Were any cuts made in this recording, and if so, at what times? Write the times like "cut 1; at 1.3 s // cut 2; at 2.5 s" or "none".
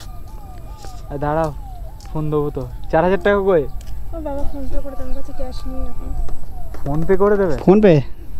none